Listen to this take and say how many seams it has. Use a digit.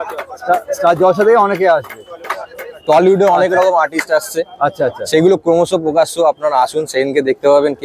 0